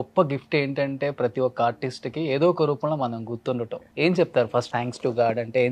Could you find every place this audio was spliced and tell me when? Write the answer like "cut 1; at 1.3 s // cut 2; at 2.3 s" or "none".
cut 1; at 3.8 s // cut 2; at 4.7 s